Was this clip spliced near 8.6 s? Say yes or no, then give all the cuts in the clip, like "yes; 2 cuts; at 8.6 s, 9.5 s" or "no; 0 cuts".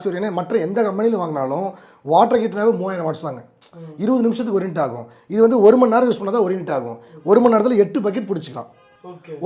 no; 0 cuts